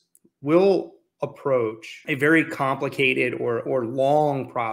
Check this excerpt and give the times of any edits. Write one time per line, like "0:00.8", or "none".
0:01.9